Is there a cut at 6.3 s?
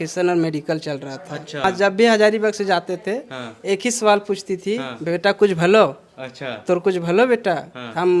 no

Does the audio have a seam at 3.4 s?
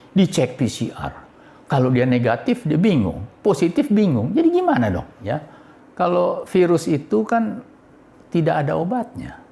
no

